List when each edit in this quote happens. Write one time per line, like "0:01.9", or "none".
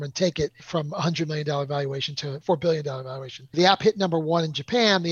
0:02.4
0:03.5

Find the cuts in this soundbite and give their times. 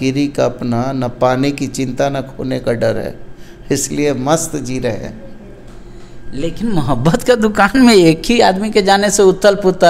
none

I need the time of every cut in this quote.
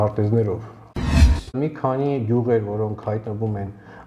0:01.2

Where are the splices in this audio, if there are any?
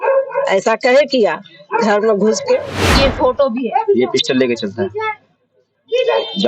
0:02.8

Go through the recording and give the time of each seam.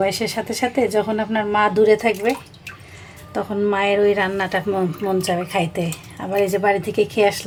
none

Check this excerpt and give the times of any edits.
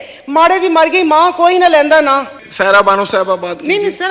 0:02.4

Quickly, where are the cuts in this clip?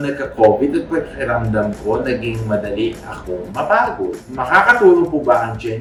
none

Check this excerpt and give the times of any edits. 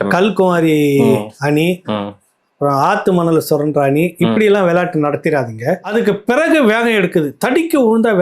0:05.8

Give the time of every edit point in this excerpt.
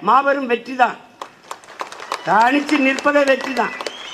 none

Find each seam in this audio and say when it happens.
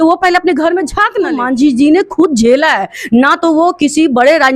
0:01.4

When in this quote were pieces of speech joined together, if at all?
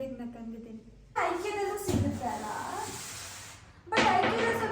0:01.2

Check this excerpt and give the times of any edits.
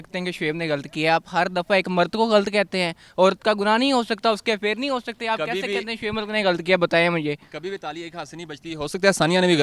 none

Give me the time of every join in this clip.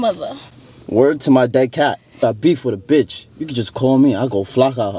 0:02.2

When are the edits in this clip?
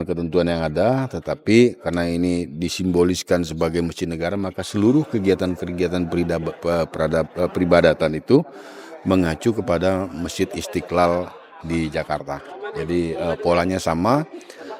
none

